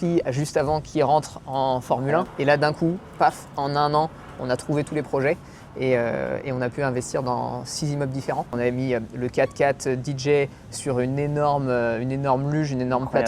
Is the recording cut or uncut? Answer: cut